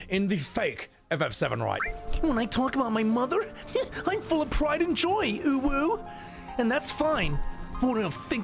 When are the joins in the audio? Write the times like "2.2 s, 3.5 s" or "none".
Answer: 1.8 s